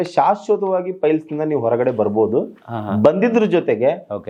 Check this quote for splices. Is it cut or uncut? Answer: uncut